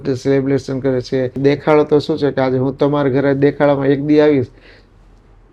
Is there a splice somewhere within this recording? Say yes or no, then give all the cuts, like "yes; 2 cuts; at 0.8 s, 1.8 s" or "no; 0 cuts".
yes; 1 cut; at 1.4 s